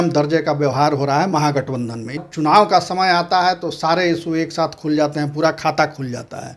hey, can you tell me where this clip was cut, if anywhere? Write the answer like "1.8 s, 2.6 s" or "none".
2.2 s